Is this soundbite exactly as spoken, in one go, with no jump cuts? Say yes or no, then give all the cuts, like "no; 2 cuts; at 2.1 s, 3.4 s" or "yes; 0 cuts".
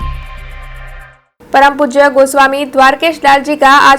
no; 1 cut; at 1.0 s